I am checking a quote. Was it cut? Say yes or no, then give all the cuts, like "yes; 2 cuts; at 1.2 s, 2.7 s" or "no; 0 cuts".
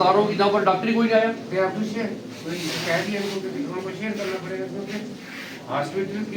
no; 0 cuts